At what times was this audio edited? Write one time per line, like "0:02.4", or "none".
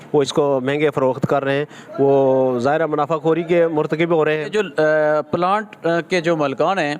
0:04.5